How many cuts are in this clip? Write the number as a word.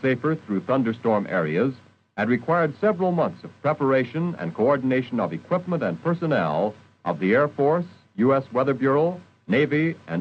one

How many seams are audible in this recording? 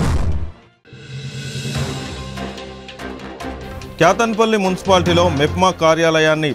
one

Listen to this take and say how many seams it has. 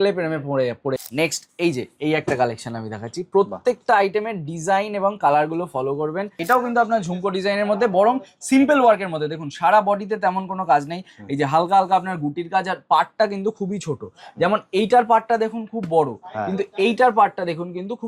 two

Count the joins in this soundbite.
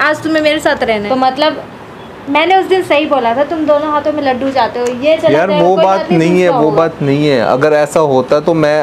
one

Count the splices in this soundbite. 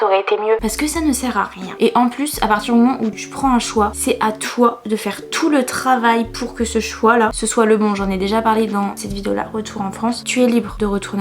zero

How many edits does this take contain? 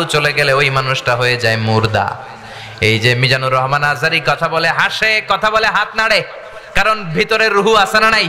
zero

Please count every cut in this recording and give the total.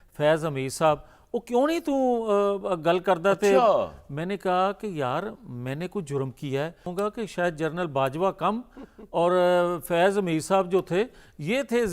one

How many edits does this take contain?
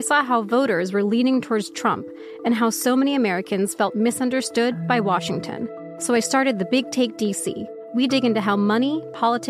two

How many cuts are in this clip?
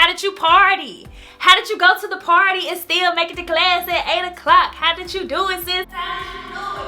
zero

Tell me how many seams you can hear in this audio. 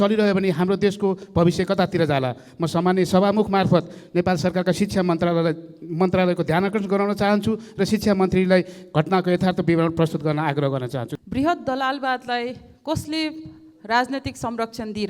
one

